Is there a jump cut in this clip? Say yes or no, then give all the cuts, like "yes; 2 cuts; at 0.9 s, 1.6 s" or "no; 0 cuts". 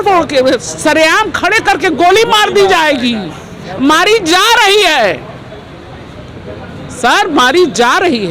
no; 0 cuts